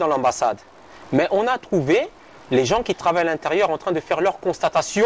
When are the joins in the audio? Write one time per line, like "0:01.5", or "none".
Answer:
none